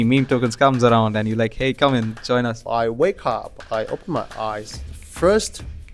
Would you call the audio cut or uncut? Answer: cut